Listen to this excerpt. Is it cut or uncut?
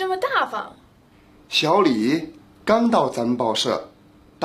uncut